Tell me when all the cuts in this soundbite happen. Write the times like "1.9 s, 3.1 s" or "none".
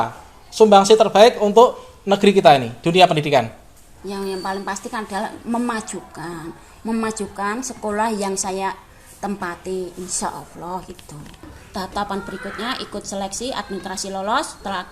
11.6 s